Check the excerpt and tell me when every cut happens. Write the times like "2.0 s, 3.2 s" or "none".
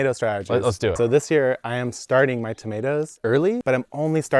0.9 s, 3.6 s